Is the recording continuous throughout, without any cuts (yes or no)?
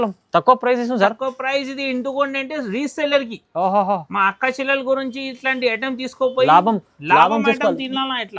yes